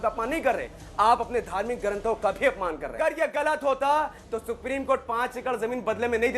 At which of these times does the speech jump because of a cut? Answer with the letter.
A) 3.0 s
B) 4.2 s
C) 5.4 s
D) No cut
A